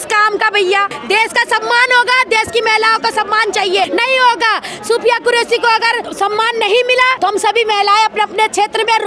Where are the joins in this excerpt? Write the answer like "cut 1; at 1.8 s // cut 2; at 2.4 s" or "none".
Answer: cut 1; at 1.0 s // cut 2; at 3.9 s // cut 3; at 6.0 s // cut 4; at 7.2 s